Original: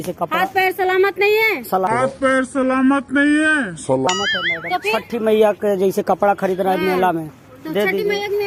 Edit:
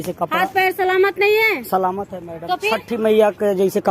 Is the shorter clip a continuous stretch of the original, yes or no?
no